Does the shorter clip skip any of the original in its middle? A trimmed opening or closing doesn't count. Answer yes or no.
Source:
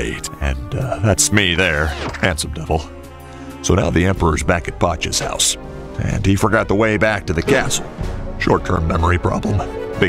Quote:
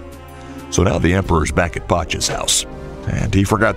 no